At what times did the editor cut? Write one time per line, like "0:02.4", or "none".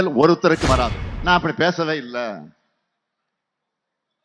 0:01.1